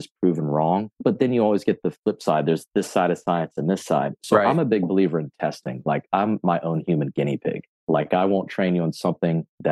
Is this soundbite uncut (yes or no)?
no